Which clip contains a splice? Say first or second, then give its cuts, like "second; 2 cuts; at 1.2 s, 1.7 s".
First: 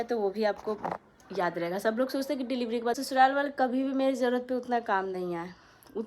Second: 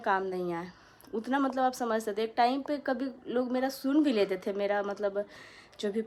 first; 1 cut; at 3.0 s